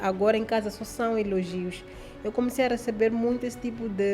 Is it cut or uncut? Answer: uncut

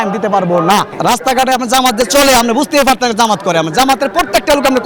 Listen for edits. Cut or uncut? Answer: cut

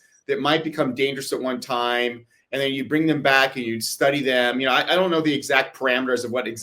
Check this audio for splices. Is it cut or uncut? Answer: uncut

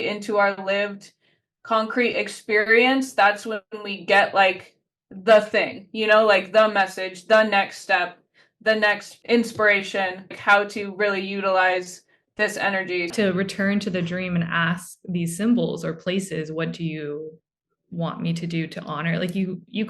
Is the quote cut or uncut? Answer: cut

